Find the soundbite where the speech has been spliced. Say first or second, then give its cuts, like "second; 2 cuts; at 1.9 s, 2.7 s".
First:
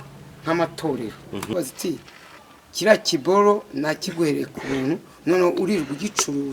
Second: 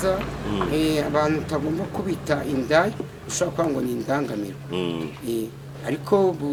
first; 1 cut; at 1.5 s